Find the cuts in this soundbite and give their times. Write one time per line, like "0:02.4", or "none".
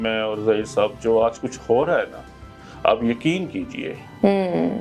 none

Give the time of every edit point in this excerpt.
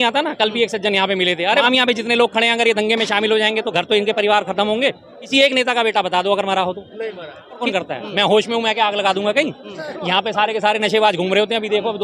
0:01.6
0:05.1
0:07.6

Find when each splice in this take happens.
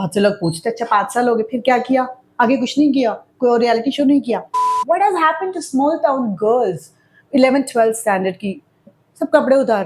0:04.5
0:08.9

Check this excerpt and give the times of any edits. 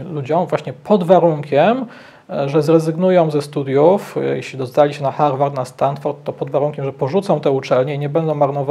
none

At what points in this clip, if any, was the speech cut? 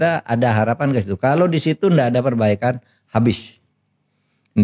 none

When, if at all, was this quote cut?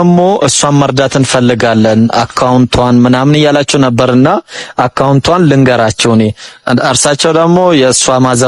none

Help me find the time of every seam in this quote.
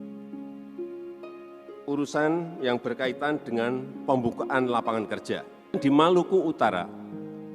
0:01.7
0:05.8

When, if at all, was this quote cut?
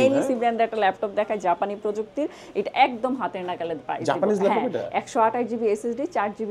none

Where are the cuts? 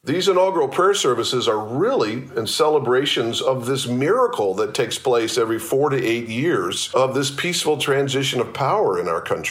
0:06.8

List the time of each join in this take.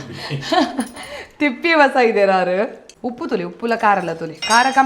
0:02.9

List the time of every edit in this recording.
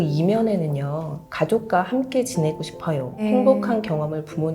0:03.2

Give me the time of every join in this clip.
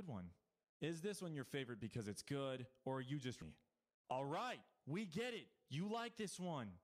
0:03.4

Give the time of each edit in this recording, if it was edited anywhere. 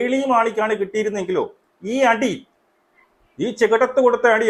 none

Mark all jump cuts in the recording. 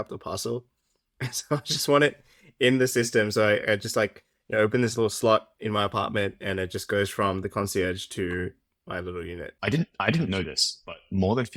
0:09.5

